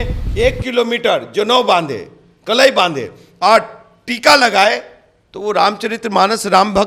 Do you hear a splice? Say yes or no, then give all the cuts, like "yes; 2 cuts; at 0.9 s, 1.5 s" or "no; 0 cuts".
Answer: no; 0 cuts